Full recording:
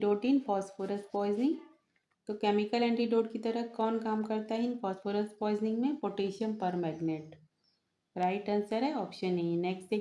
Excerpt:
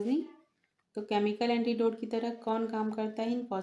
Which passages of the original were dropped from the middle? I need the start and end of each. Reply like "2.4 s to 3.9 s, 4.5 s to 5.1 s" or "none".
none